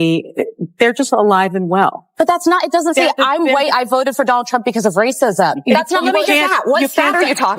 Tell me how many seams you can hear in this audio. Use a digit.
2